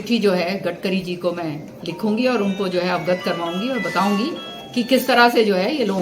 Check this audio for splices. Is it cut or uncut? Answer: uncut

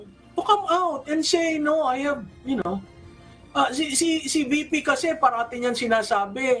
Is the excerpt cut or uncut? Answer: uncut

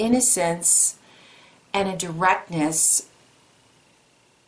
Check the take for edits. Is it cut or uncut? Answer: uncut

